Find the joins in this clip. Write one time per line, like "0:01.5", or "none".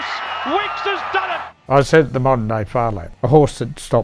0:01.5
0:03.0